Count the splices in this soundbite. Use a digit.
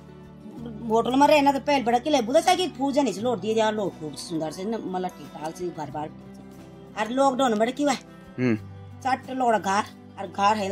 0